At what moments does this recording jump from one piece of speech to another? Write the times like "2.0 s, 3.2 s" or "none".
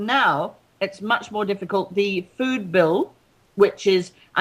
1.9 s